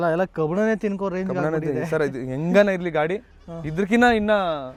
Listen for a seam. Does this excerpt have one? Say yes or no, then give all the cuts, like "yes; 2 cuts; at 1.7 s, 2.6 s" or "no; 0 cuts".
no; 0 cuts